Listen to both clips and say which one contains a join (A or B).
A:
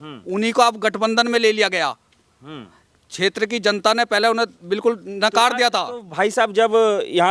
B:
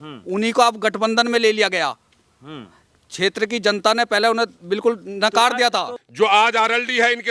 B